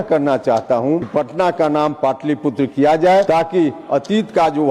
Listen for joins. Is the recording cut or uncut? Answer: cut